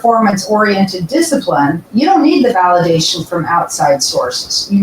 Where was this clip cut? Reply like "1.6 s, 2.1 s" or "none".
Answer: 1.8 s

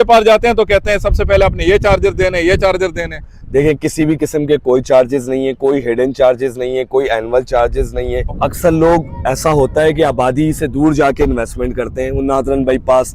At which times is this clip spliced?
8.3 s

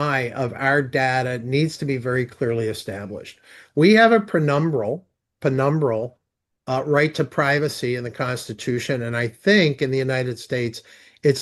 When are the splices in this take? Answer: none

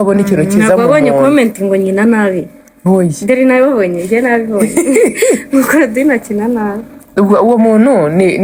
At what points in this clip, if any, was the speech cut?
none

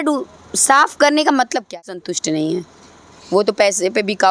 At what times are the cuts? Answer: 1.7 s

